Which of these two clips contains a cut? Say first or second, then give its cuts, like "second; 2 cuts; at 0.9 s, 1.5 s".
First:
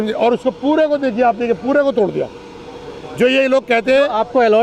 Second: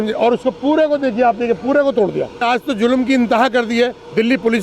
second; 1 cut; at 2.4 s